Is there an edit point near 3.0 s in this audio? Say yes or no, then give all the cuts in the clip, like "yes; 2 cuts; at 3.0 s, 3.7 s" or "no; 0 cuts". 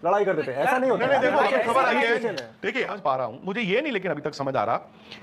yes; 1 cut; at 3.0 s